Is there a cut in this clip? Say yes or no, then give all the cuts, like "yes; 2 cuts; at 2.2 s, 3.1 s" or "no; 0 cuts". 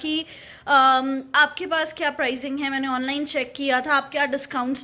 no; 0 cuts